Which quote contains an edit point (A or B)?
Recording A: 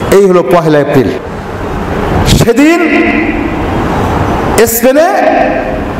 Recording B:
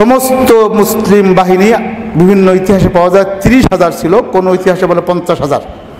A